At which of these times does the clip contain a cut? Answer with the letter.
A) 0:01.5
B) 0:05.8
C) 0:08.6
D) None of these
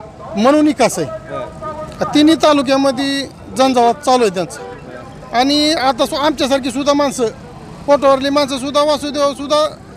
D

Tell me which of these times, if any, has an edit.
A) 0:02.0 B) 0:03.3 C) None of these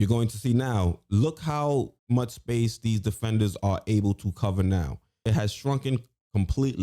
A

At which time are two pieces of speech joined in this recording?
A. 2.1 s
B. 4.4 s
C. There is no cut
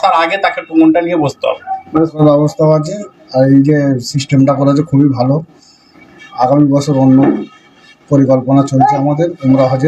A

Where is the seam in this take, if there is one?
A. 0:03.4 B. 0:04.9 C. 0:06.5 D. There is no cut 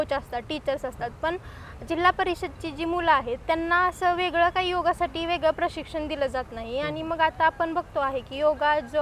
D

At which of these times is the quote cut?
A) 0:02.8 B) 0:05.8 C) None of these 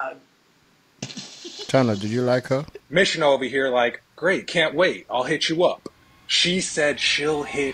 A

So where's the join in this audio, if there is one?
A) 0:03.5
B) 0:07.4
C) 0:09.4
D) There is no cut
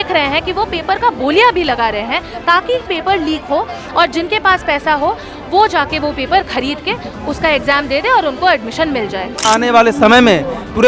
C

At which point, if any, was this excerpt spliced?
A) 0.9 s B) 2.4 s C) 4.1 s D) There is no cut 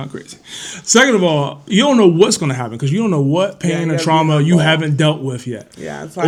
D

